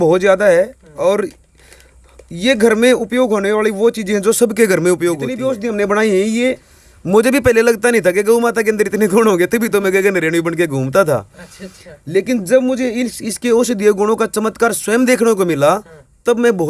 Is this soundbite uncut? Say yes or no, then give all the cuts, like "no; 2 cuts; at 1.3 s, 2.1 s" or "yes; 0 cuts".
no; 1 cut; at 5.3 s